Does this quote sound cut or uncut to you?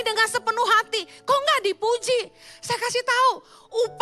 uncut